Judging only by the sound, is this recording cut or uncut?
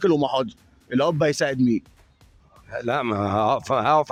uncut